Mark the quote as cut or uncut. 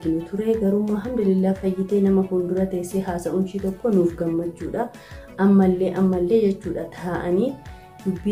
uncut